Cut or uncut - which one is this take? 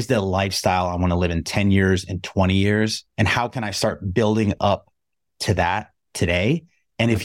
cut